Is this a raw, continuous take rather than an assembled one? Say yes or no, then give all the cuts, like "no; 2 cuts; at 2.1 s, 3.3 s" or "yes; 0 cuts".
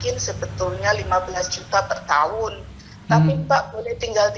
yes; 0 cuts